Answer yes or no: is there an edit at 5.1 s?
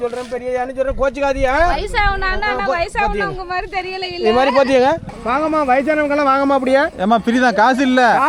yes